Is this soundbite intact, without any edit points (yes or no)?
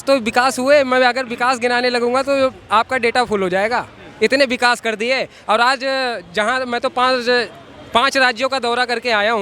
yes